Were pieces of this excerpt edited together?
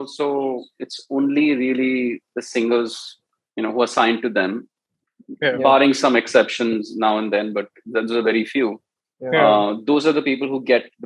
no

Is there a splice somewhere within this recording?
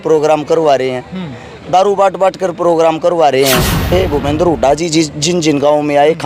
yes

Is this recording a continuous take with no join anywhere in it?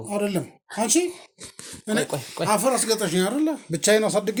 yes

